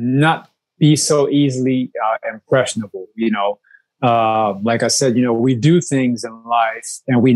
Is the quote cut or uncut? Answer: uncut